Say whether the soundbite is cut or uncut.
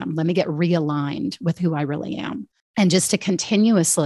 cut